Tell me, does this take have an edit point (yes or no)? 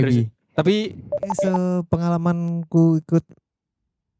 yes